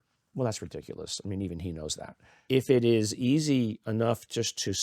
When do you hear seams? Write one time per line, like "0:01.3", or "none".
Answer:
0:02.3